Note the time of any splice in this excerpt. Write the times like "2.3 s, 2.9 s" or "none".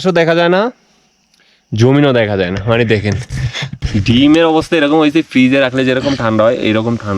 3.8 s